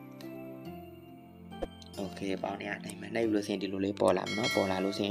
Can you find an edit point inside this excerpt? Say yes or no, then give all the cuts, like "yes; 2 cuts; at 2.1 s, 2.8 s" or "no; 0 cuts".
no; 0 cuts